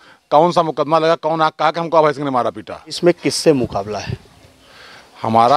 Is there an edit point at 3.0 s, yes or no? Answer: yes